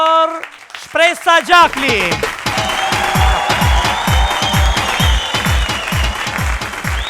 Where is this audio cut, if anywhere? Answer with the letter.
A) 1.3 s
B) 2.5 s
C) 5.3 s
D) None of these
B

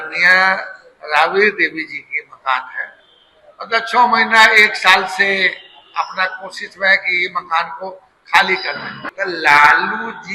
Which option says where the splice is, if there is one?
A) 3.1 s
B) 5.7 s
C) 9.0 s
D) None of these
C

